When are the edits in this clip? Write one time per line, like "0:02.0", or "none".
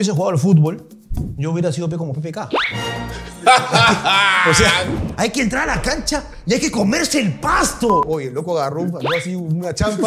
0:04.9